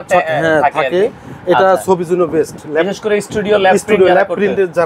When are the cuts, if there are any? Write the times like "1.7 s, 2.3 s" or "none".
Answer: none